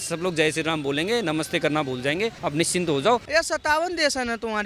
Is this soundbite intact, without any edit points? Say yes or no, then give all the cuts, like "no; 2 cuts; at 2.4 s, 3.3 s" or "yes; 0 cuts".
no; 2 cuts; at 2.4 s, 3.3 s